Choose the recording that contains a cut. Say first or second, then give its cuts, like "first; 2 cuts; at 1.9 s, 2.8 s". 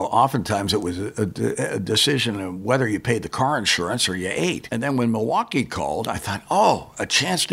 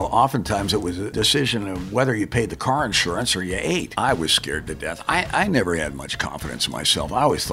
second; 2 cuts; at 1.1 s, 3.9 s